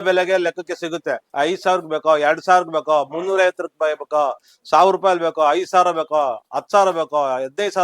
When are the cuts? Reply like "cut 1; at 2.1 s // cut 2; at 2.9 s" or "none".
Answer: cut 1; at 1.2 s